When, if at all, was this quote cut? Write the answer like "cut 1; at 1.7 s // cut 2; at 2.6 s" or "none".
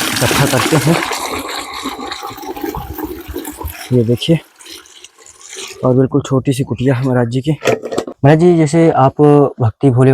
cut 1; at 8.1 s